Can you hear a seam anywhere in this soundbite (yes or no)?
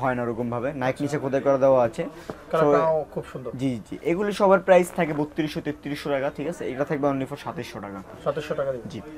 no